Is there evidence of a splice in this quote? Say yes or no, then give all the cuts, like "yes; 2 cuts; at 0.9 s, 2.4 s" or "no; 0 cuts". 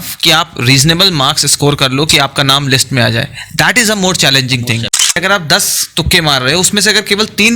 yes; 1 cut; at 5.2 s